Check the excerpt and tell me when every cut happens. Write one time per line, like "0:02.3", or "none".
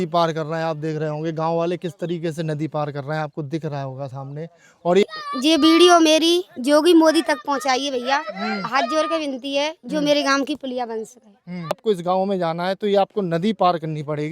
0:05.0
0:11.8